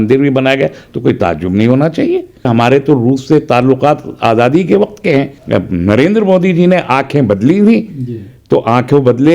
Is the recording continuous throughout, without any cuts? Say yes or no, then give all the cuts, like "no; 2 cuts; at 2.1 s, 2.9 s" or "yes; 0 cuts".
no; 2 cuts; at 2.5 s, 5.4 s